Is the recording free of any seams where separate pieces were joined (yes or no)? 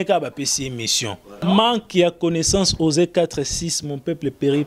no